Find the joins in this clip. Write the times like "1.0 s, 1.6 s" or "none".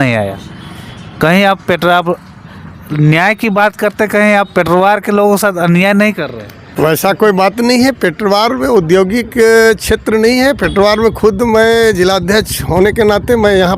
none